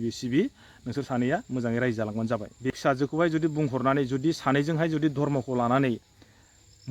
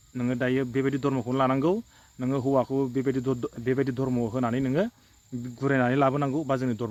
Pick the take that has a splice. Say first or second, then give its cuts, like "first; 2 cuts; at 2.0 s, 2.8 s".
first; 1 cut; at 2.7 s